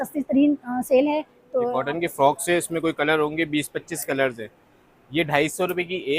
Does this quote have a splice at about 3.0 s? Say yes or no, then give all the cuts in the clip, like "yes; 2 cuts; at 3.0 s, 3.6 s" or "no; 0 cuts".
no; 1 cut; at 1.7 s